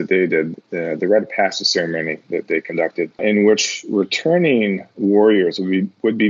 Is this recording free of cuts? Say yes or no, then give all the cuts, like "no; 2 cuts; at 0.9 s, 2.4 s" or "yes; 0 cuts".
no; 1 cut; at 3.2 s